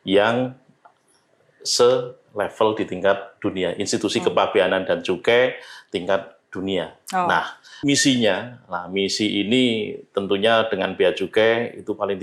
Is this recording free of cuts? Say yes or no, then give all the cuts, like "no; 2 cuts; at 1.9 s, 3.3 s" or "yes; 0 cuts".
no; 1 cut; at 7.7 s